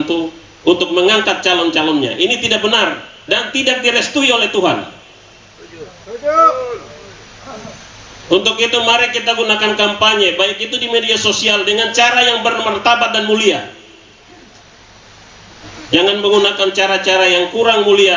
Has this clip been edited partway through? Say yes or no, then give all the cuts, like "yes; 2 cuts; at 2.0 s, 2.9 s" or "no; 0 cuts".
yes; 1 cut; at 15.6 s